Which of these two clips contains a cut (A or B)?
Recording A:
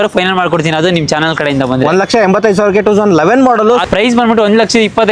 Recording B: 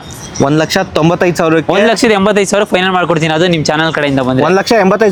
A